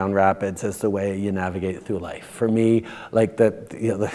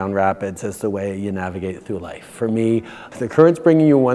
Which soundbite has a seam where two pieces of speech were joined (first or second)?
second